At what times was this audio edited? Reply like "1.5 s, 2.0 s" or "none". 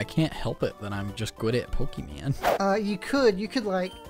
2.4 s